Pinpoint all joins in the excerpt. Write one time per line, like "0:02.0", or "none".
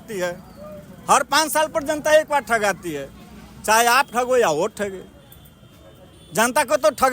none